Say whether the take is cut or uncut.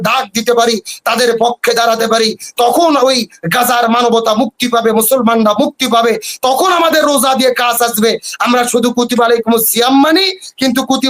uncut